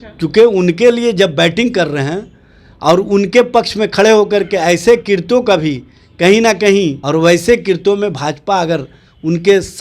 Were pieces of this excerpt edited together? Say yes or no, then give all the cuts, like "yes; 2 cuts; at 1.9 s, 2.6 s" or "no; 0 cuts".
yes; 1 cut; at 7.0 s